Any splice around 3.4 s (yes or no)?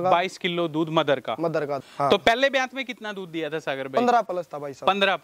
no